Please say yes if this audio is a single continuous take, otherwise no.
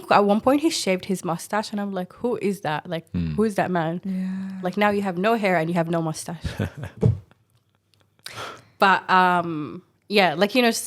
yes